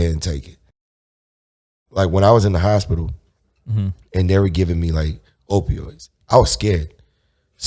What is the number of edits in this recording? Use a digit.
1